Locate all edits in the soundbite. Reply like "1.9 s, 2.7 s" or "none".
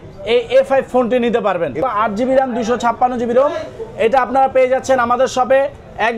1.9 s